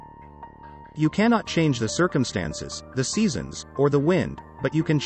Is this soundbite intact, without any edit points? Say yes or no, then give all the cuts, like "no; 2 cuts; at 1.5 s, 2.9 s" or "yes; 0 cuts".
no; 1 cut; at 0.9 s